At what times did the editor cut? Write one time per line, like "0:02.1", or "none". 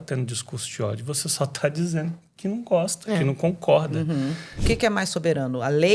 0:04.5